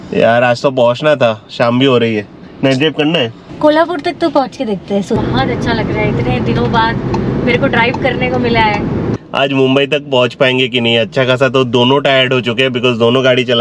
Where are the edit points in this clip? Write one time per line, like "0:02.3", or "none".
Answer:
0:03.4
0:05.2
0:09.1